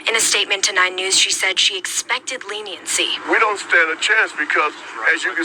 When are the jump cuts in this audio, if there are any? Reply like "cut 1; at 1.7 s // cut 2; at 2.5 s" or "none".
none